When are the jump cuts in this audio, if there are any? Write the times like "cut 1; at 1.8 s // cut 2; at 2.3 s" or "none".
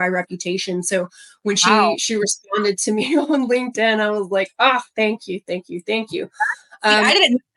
none